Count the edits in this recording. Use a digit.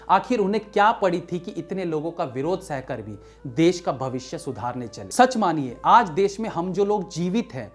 1